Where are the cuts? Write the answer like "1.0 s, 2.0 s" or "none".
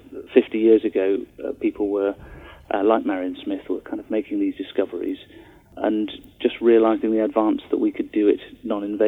5.7 s